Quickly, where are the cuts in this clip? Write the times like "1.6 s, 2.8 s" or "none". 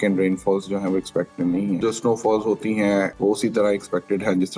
1.8 s, 3.1 s